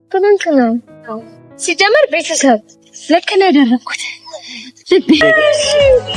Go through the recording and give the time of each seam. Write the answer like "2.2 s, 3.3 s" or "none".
5.2 s